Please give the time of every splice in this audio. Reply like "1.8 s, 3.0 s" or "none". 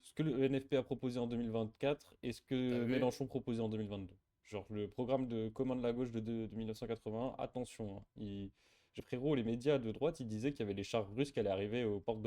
8.9 s